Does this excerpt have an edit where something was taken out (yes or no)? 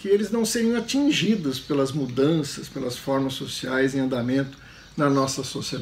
no